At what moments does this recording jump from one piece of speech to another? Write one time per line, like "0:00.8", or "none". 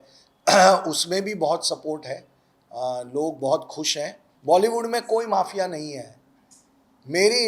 0:04.3